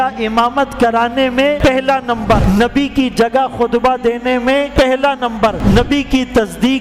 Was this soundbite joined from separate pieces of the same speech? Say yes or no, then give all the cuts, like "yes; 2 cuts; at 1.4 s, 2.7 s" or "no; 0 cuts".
yes; 4 cuts; at 1.6 s, 2.4 s, 4.7 s, 5.6 s